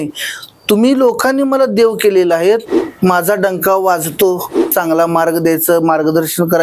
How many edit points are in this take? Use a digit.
2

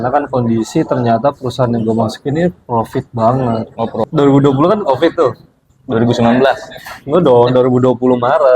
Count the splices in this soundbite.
1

